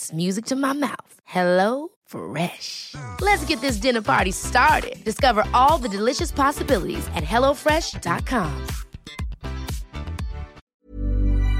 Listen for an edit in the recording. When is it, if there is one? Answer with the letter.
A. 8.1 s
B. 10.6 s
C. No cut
B